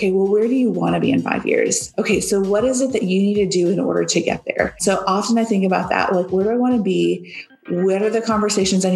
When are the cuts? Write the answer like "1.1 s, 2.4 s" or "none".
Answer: 1.9 s, 4.8 s